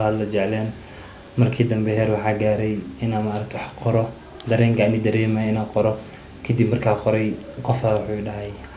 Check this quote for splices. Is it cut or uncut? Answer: uncut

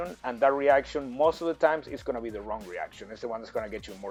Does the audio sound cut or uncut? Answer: uncut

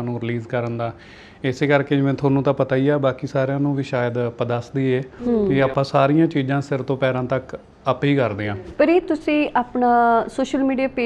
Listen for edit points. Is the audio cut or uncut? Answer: cut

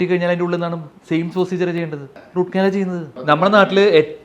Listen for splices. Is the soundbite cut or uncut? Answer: cut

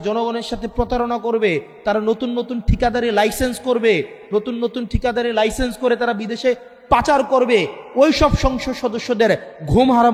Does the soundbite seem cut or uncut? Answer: uncut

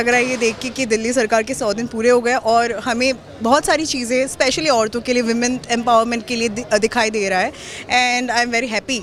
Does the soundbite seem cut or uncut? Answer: uncut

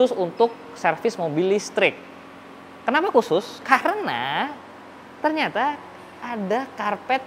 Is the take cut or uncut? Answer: uncut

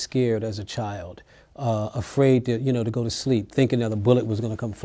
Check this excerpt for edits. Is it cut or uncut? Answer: uncut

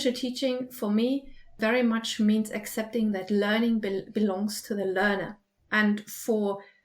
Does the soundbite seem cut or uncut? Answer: cut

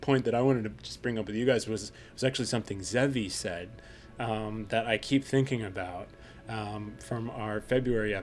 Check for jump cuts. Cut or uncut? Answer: uncut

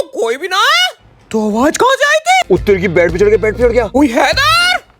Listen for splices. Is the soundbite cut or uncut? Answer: cut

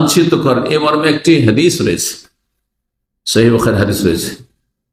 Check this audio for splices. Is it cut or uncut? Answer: uncut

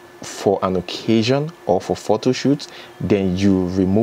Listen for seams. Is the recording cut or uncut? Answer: uncut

